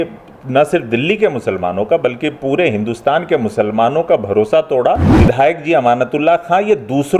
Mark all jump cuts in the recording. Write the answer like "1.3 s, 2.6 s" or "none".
5.1 s